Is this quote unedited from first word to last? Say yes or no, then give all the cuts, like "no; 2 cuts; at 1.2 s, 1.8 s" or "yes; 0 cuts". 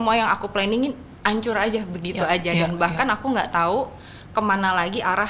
yes; 0 cuts